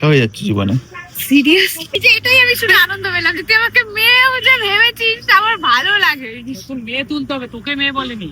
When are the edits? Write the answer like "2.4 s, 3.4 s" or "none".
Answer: 2.0 s